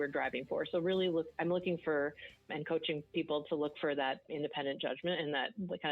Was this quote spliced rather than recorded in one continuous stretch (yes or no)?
yes